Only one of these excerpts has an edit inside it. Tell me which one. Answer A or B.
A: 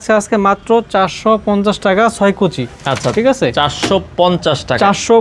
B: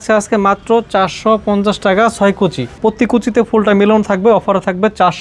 B